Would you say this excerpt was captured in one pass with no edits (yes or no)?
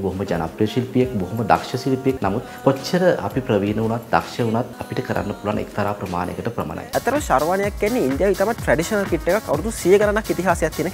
no